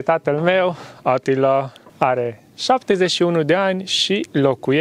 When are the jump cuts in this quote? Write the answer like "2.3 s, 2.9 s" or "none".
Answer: 1.8 s